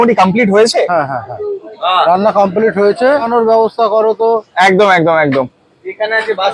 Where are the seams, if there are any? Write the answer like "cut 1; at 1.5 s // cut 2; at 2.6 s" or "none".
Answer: cut 1; at 3.3 s